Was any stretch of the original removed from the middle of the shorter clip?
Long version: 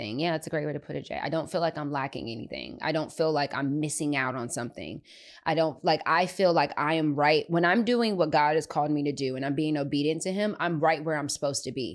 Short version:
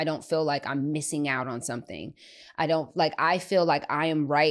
no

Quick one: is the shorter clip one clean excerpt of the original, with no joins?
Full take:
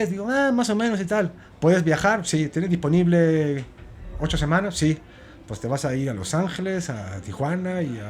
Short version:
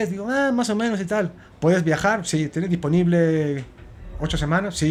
yes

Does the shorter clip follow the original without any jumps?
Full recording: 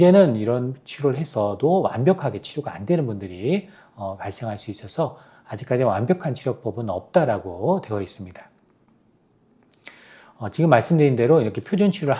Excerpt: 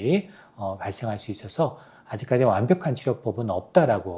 yes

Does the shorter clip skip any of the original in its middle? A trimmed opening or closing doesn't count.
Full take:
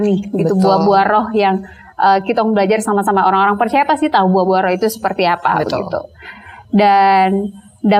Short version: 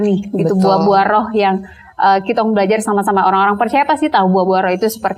no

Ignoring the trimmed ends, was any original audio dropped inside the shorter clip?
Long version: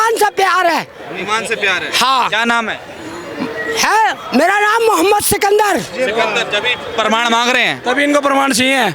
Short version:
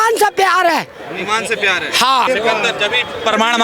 yes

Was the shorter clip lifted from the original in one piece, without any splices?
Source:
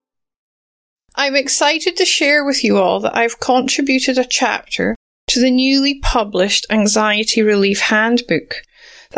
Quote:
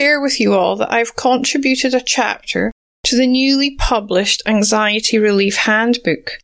yes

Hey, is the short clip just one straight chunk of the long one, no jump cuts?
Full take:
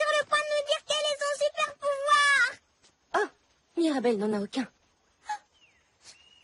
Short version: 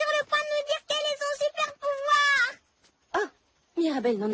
yes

